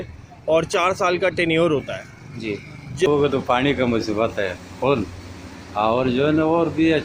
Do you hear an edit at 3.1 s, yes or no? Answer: yes